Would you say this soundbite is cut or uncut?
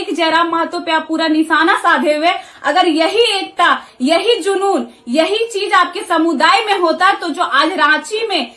uncut